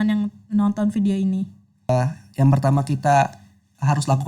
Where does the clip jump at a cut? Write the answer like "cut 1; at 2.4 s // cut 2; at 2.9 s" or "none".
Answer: cut 1; at 1.9 s